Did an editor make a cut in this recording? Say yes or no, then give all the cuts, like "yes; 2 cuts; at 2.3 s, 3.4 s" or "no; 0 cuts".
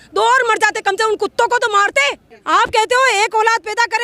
yes; 1 cut; at 2.3 s